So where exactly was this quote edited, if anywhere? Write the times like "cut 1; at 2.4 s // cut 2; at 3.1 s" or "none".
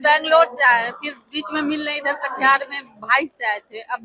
none

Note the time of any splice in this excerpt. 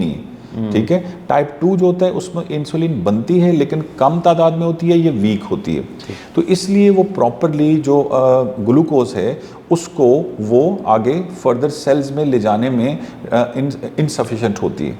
none

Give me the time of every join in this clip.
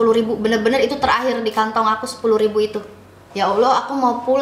cut 1; at 3.2 s

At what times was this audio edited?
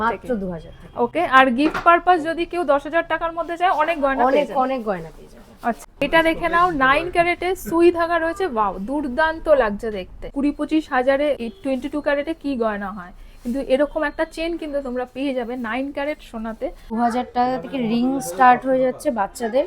cut 1; at 5.8 s // cut 2; at 10.3 s // cut 3; at 11.4 s // cut 4; at 16.9 s

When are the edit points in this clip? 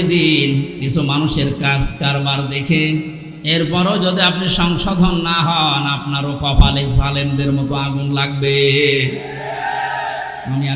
none

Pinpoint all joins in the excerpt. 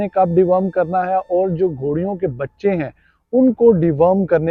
none

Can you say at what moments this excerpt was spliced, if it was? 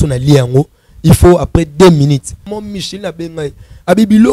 cut 1; at 2.5 s

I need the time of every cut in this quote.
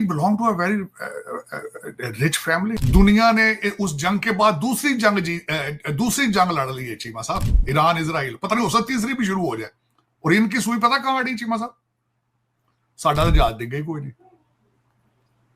cut 1; at 2.8 s

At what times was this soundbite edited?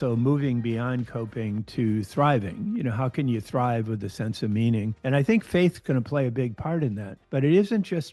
none

